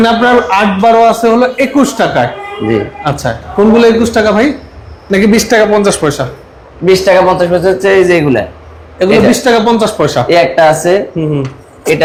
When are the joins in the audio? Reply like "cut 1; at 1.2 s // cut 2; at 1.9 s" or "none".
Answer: none